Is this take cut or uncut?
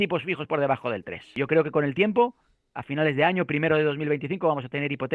cut